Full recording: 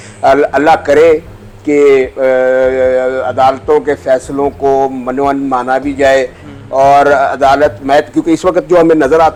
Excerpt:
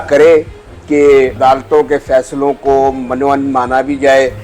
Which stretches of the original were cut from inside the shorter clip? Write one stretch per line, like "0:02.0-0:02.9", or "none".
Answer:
0:02.1-0:03.3